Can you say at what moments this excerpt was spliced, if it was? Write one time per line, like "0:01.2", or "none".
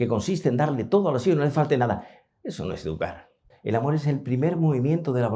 0:03.5